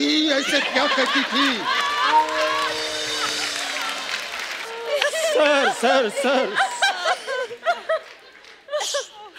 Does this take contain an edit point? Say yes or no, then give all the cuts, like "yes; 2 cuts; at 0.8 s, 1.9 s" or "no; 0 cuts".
yes; 1 cut; at 4.6 s